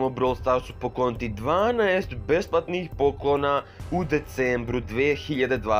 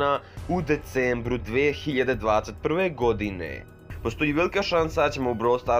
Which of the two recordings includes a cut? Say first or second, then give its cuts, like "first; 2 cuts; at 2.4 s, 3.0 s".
second; 1 cut; at 3.7 s